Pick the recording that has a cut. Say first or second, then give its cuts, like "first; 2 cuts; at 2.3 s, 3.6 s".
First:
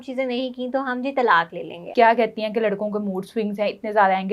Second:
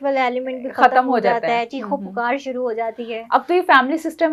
first; 1 cut; at 1.8 s